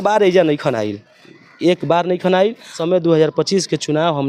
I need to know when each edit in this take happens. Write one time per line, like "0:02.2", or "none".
0:02.8